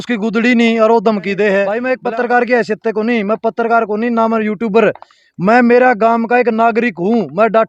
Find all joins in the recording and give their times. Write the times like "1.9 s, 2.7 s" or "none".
1.8 s

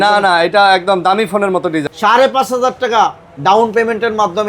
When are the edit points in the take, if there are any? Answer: 1.9 s

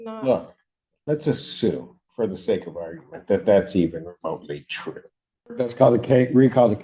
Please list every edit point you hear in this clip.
5.5 s

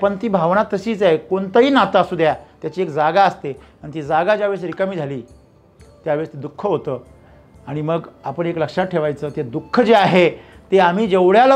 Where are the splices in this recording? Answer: none

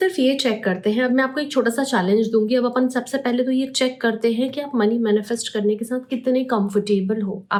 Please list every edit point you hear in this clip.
none

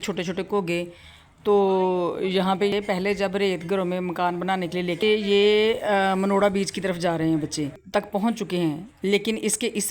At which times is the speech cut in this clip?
2.7 s, 5.0 s, 7.8 s

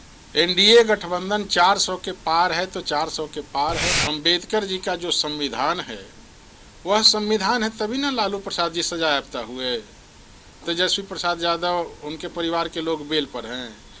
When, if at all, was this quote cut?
4.0 s

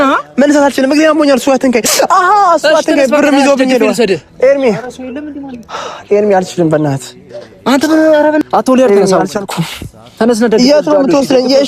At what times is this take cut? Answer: 8.4 s

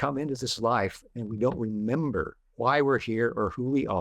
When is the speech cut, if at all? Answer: 2.4 s

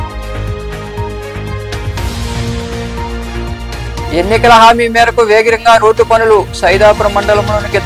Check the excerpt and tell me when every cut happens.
1.8 s

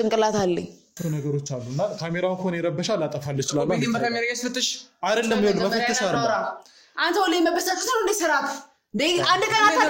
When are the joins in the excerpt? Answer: 1.0 s

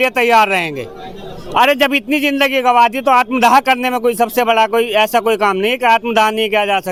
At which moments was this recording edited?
none

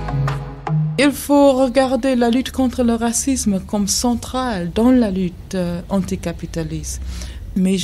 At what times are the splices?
1.0 s

